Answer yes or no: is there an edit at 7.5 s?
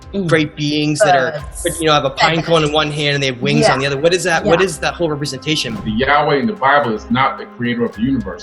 no